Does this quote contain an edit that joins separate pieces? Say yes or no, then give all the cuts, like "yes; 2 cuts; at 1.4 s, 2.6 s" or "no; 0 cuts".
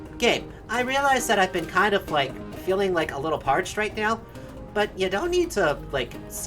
yes; 1 cut; at 2.5 s